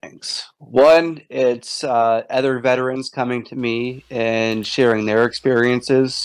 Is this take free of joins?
yes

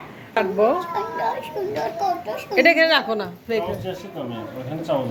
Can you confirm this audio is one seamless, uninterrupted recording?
yes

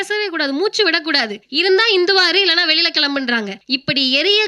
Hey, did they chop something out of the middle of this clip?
yes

